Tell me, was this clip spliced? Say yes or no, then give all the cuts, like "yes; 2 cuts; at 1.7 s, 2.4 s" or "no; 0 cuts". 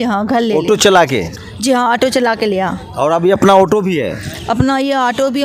no; 0 cuts